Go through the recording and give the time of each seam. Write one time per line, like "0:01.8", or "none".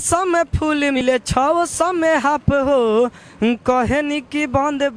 0:01.0